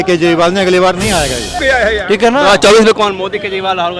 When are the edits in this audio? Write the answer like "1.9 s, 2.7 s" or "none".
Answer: 1.5 s